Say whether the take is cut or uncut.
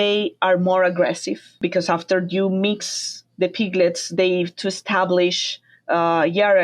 cut